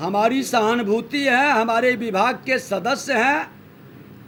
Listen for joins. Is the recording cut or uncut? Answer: uncut